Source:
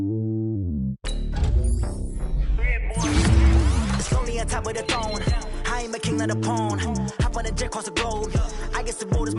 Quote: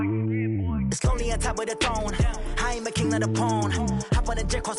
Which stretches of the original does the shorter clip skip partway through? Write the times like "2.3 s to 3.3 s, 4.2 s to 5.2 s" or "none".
0.9 s to 4.0 s